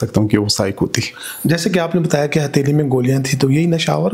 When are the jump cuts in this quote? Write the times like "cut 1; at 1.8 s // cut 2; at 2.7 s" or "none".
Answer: none